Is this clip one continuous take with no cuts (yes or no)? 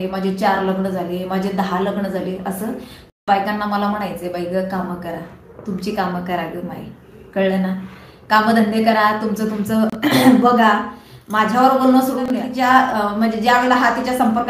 no